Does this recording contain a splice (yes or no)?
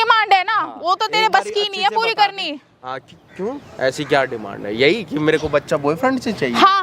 no